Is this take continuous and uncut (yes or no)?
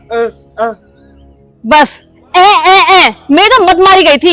yes